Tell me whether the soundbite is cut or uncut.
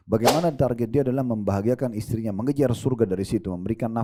uncut